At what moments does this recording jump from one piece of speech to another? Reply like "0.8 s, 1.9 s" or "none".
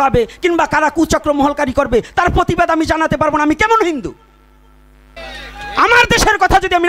5.2 s